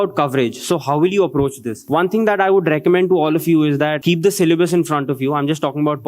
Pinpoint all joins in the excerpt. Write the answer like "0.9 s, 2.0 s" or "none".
1.7 s, 4.0 s

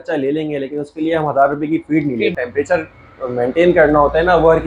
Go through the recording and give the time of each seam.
2.3 s

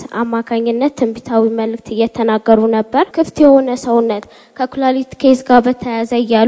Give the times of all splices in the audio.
3.1 s

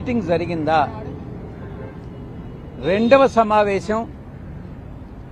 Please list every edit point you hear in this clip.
none

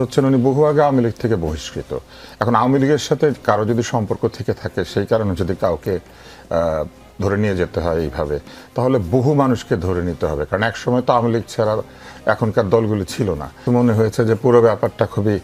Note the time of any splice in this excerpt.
13.6 s

